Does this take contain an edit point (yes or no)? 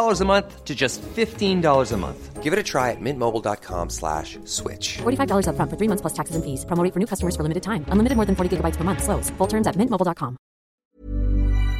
yes